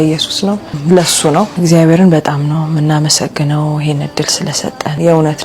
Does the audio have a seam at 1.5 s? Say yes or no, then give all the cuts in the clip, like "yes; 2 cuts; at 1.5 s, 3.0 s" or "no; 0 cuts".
yes; 1 cut; at 1.5 s